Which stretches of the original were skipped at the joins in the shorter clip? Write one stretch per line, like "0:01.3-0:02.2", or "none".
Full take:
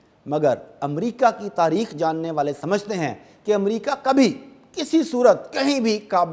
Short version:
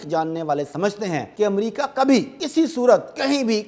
0:03.2-0:03.4
0:04.5-0:04.7